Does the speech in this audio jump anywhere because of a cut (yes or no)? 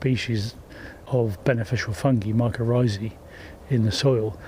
no